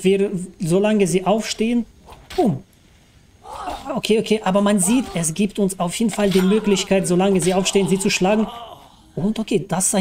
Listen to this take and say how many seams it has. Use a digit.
0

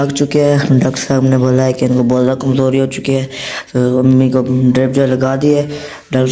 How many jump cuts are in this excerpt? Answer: 0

